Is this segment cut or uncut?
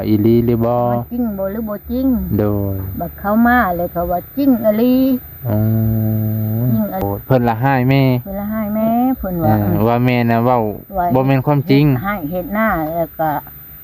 cut